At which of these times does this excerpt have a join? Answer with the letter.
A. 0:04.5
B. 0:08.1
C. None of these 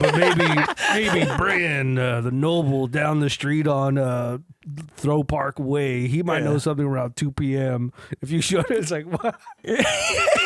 C